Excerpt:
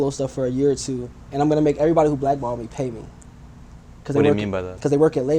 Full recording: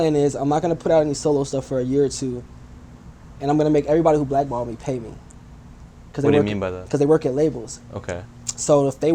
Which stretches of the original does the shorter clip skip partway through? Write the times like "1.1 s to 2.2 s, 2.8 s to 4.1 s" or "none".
2.5 s to 3.2 s